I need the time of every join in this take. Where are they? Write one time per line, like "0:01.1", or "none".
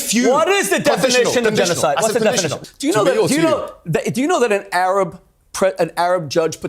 0:02.6